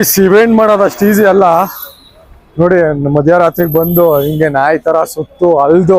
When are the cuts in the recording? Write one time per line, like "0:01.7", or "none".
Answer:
none